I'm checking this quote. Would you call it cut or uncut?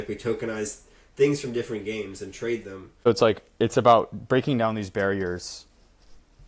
cut